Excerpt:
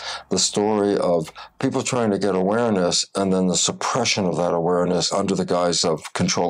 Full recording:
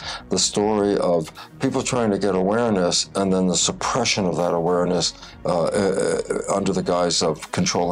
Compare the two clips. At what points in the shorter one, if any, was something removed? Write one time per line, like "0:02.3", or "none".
0:05.1